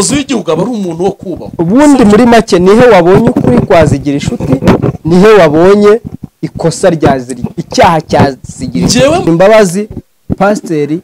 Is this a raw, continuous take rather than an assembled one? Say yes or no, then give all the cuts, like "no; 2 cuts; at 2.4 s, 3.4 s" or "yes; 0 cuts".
no; 1 cut; at 9.3 s